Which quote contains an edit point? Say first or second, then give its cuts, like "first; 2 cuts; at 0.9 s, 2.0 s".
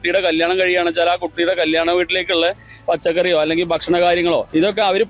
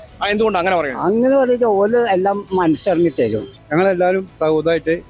second; 1 cut; at 3.5 s